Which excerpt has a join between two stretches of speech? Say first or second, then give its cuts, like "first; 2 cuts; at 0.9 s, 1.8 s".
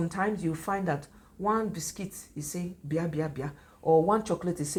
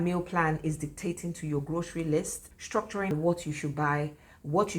second; 1 cut; at 2.6 s